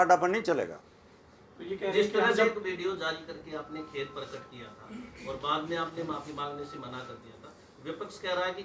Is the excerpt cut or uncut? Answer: uncut